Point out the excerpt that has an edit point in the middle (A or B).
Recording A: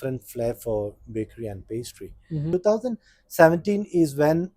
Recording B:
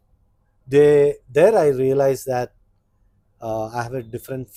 A